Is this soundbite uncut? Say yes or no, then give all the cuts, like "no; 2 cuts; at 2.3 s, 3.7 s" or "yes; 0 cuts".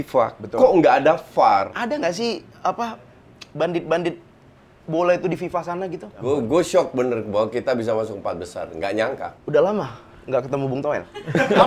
no; 3 cuts; at 1.7 s, 6.1 s, 9.3 s